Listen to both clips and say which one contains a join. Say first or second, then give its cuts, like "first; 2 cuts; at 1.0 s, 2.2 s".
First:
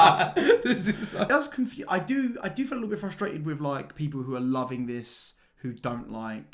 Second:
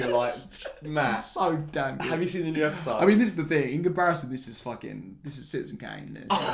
first; 1 cut; at 1.3 s